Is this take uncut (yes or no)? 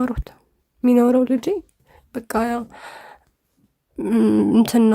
yes